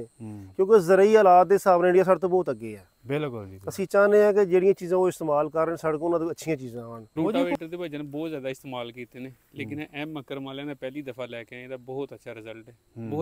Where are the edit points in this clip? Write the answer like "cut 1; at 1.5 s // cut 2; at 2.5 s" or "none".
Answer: cut 1; at 6.8 s

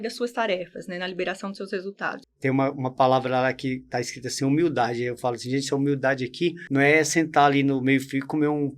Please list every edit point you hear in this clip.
cut 1; at 2.2 s // cut 2; at 6.6 s

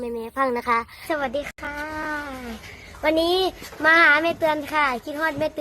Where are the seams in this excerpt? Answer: cut 1; at 0.9 s

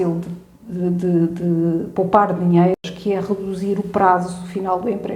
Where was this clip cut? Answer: cut 1; at 2.8 s

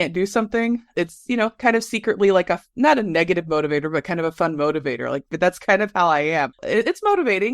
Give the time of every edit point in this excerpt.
cut 1; at 0.9 s

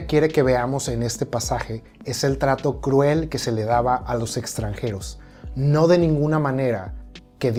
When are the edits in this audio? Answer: none

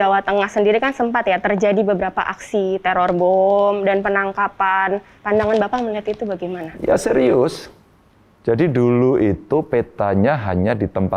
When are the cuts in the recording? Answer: cut 1; at 5.1 s

